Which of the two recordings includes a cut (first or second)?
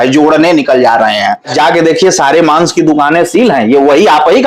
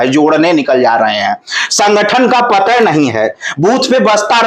first